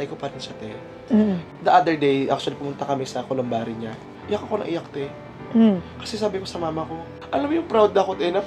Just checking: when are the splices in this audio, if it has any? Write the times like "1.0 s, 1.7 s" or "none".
none